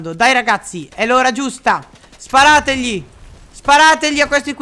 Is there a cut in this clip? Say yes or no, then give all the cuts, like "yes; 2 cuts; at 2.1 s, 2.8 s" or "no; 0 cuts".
no; 0 cuts